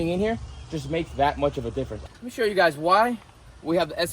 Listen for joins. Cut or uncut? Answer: cut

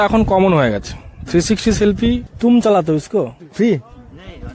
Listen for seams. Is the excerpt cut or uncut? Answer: cut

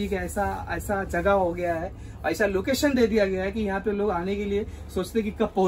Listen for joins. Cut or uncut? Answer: uncut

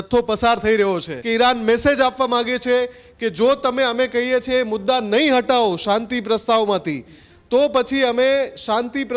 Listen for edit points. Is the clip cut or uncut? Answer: cut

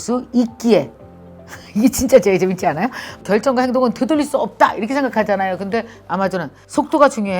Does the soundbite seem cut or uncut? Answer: cut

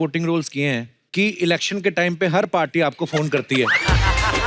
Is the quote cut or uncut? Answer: cut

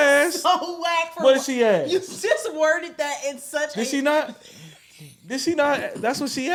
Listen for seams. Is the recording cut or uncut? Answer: uncut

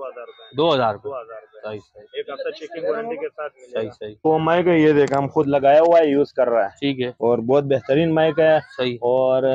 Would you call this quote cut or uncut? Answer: cut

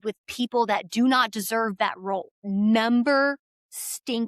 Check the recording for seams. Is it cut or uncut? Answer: cut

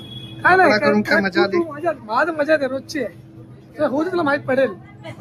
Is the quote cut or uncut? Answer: uncut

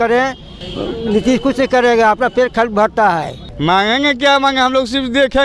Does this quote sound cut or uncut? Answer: cut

